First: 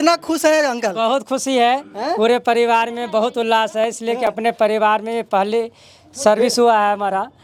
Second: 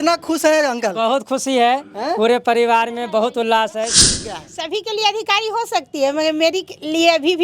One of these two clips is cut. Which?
second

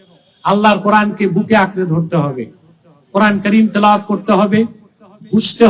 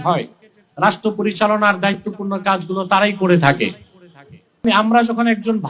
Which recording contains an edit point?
second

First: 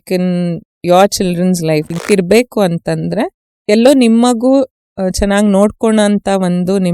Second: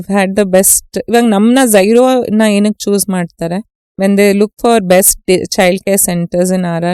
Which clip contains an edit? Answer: first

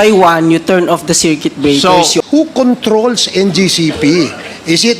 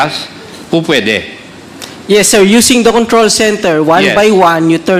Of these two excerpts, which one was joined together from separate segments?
first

